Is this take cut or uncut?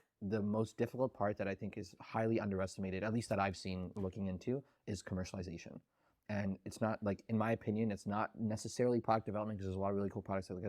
uncut